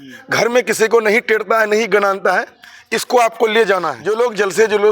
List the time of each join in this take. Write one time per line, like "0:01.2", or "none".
0:04.0